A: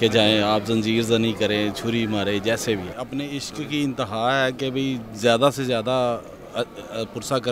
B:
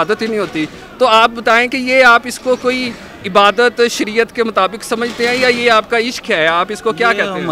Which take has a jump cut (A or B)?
A